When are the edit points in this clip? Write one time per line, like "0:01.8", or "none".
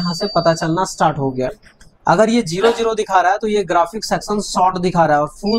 none

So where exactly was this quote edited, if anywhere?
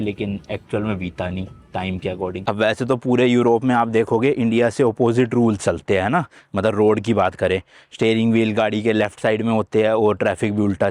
0:02.4

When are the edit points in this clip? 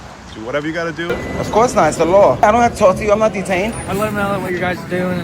0:01.1
0:02.4
0:03.8

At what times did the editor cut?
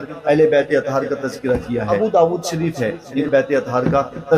0:01.9
0:03.2

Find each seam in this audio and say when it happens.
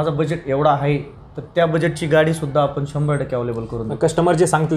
none

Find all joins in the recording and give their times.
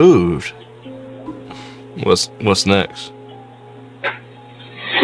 0:01.1

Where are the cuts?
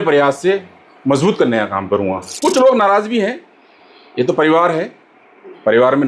0:02.3

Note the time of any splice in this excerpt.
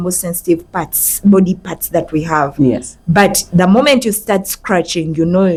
none

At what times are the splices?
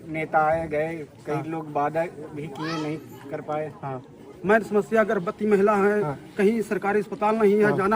0:04.3

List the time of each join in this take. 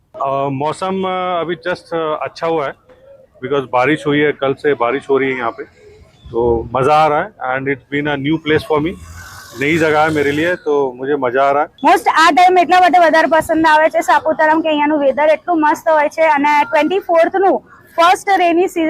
0:11.3

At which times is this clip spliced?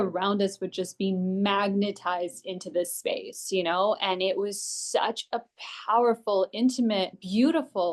none

